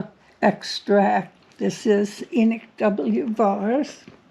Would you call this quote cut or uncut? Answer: cut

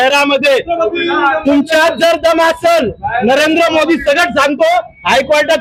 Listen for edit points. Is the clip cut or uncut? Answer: uncut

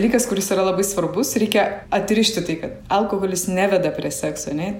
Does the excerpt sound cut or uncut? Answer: cut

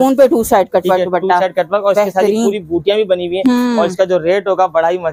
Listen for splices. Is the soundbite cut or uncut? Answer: uncut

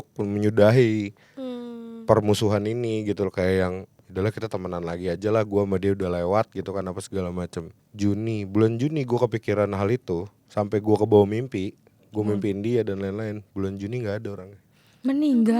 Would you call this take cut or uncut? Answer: cut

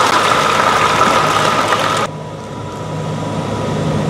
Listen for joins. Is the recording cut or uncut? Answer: cut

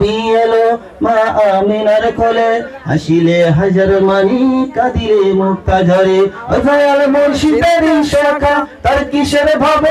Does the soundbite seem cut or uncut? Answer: uncut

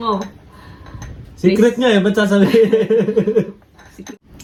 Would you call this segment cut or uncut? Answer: uncut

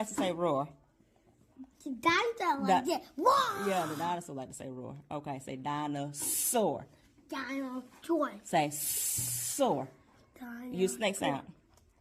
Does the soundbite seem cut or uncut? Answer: uncut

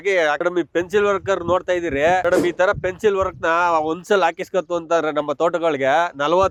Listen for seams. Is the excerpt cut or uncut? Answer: uncut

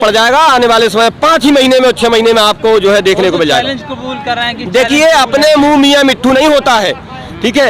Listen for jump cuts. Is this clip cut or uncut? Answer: uncut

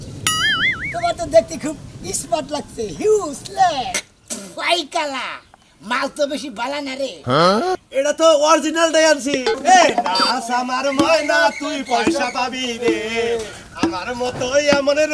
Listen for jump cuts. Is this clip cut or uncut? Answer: cut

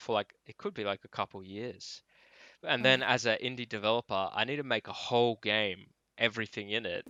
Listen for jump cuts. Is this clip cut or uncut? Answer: uncut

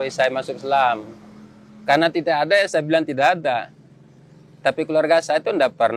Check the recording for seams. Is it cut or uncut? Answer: uncut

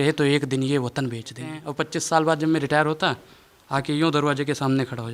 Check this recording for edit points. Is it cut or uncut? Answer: cut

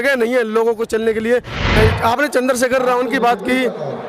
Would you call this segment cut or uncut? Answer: cut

